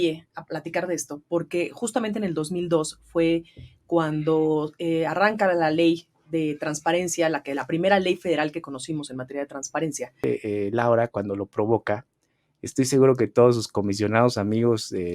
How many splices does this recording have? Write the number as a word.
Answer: one